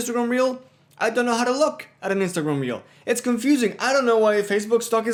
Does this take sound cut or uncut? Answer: uncut